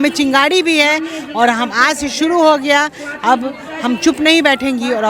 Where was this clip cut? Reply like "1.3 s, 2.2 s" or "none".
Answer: none